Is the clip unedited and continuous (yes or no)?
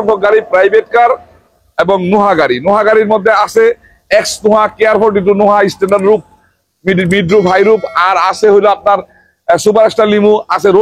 yes